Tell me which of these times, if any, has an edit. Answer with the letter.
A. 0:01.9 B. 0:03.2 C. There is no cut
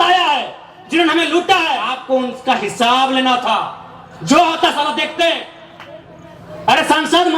A